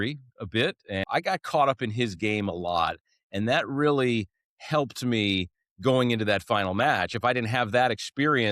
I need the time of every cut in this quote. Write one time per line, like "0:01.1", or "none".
0:01.0